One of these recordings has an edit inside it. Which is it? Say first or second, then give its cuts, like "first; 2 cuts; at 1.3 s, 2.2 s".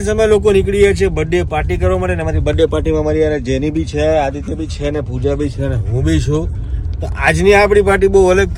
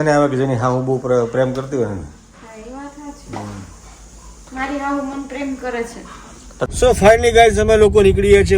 second; 1 cut; at 6.5 s